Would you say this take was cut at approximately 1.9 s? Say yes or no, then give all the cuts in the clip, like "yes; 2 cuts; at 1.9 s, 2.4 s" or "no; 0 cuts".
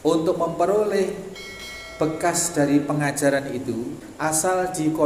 no; 1 cut; at 4.0 s